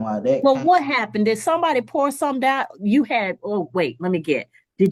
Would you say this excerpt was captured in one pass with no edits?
yes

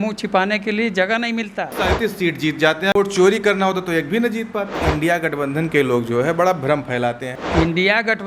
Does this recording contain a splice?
yes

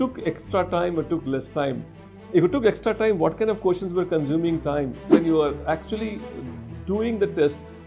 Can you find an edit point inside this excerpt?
yes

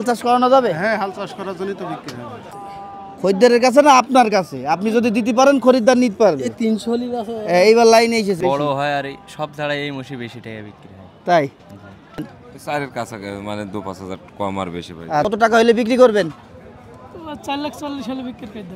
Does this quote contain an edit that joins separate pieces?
yes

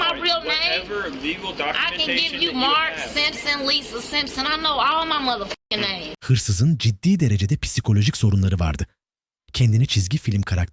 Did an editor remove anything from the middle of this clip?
no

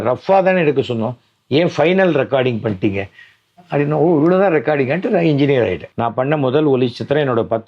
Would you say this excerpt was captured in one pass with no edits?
no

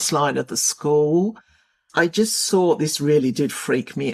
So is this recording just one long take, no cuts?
no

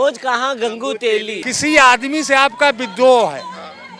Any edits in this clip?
yes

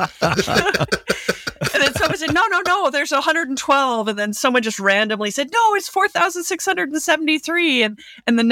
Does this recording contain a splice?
no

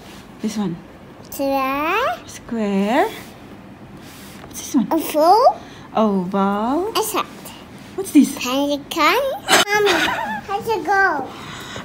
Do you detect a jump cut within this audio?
no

